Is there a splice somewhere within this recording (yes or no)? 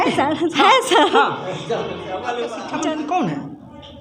yes